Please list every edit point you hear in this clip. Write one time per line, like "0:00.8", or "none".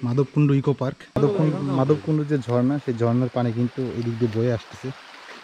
0:01.2